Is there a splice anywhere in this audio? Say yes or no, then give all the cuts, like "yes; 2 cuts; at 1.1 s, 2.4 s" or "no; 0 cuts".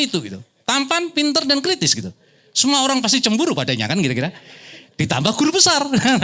no; 0 cuts